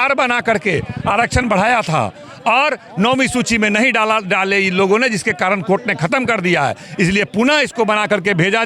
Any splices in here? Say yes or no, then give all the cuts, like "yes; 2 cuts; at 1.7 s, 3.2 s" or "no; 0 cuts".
no; 0 cuts